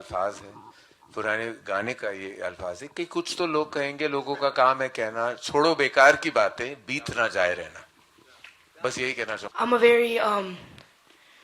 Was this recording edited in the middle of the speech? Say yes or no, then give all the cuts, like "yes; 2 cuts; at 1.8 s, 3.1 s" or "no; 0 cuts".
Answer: yes; 1 cut; at 9.4 s